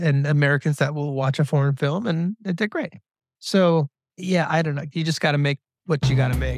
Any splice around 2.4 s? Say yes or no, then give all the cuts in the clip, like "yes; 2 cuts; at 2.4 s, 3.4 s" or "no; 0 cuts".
no; 2 cuts; at 4.0 s, 4.8 s